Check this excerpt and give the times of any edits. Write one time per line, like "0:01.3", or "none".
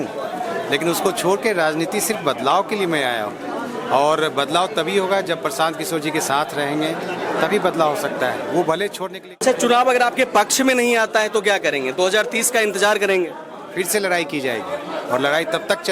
0:09.4